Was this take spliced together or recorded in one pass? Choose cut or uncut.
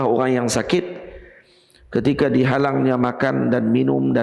uncut